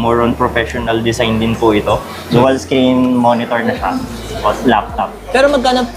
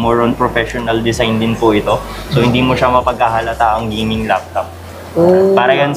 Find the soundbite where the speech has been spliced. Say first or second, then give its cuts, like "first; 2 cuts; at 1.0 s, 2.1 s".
first; 1 cut; at 2.2 s